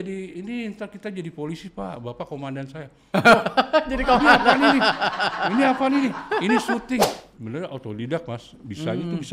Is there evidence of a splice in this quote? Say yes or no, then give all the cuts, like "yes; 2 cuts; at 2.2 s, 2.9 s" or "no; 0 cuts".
yes; 1 cut; at 7.2 s